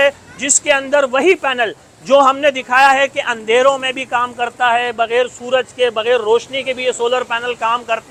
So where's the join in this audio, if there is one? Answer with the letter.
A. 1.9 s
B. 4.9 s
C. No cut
C